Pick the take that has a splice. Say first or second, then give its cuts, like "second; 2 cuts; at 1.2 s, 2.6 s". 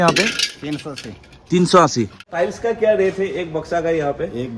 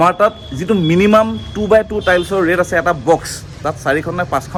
first; 1 cut; at 2.3 s